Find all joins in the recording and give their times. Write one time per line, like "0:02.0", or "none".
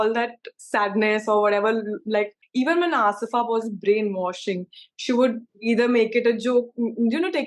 0:02.4